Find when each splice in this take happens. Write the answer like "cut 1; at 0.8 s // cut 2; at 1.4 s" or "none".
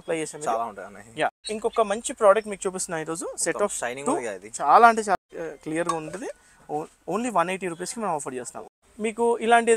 cut 1; at 1.5 s // cut 2; at 5.2 s // cut 3; at 8.9 s